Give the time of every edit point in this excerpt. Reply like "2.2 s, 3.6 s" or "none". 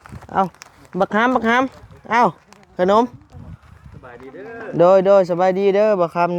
none